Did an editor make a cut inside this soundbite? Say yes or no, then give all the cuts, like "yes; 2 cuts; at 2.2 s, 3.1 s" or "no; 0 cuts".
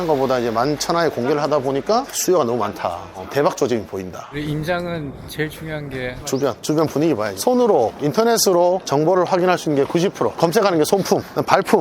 yes; 1 cut; at 4.3 s